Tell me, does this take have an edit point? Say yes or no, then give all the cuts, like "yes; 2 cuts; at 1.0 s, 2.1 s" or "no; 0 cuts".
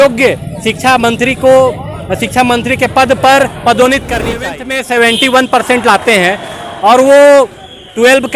yes; 1 cut; at 4.5 s